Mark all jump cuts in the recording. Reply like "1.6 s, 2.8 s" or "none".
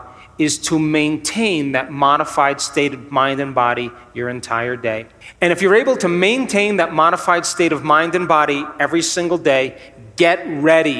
5.2 s